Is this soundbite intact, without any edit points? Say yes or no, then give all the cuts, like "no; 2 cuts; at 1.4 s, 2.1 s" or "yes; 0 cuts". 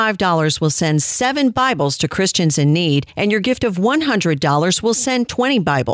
no; 1 cut; at 3.1 s